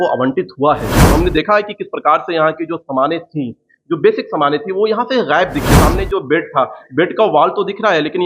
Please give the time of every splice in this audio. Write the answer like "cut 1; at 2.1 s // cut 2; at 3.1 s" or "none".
cut 1; at 1.1 s // cut 2; at 5.8 s